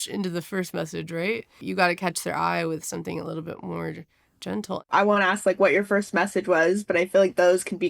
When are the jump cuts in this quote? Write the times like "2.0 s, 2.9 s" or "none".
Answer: 1.6 s, 4.8 s